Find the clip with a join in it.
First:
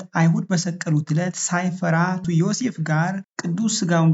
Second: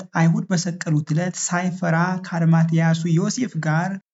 first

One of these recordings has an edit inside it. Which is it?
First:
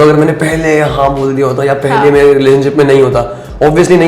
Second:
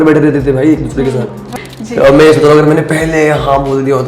second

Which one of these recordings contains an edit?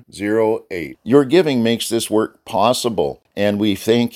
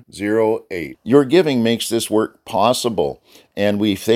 first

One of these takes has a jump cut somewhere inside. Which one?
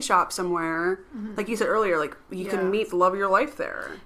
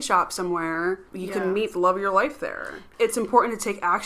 second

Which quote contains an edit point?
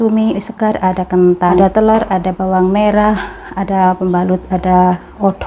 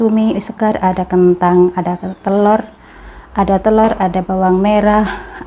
first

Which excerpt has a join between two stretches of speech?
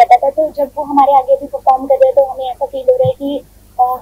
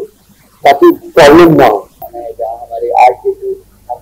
second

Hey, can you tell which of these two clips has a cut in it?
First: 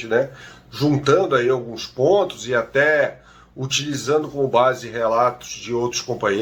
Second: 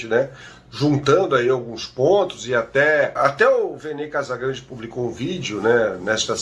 second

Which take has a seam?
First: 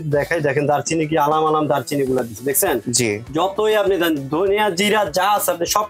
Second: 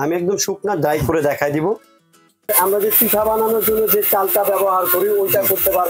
second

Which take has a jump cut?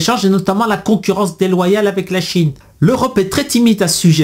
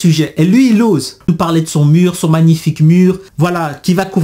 second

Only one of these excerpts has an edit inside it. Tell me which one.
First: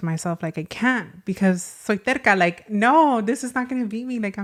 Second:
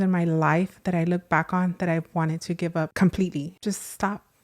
second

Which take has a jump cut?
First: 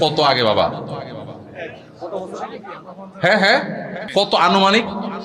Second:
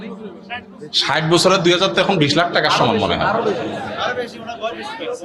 first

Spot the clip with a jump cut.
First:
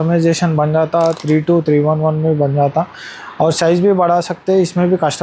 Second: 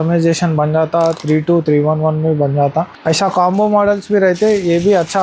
second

